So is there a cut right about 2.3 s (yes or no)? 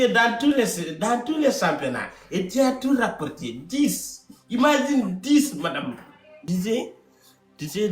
no